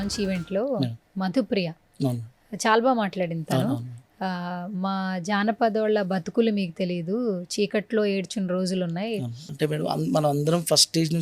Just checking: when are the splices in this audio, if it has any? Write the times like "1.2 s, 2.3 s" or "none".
9.4 s